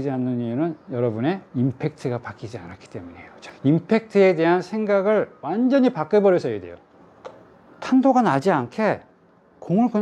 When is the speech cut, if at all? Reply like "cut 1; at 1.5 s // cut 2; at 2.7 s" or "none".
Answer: cut 1; at 6.7 s